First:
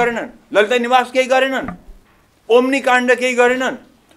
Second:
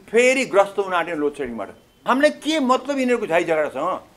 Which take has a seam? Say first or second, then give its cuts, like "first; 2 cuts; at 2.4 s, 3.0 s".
second; 1 cut; at 1.8 s